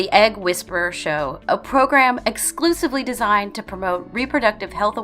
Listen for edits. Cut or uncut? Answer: cut